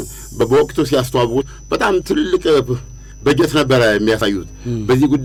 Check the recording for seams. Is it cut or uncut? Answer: uncut